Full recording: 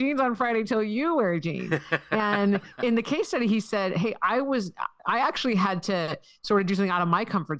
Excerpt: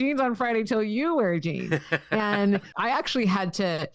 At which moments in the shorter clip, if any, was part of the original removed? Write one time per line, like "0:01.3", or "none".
0:02.7